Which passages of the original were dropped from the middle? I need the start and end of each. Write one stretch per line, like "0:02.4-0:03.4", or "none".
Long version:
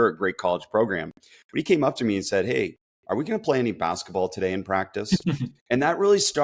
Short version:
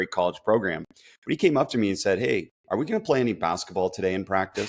0:02.8-0:02.9